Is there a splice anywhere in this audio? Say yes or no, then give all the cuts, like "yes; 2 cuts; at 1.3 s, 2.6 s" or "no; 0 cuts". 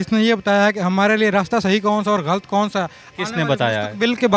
no; 0 cuts